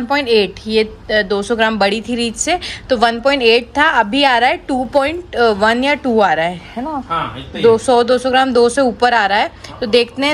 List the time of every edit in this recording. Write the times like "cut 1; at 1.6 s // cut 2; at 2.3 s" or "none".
none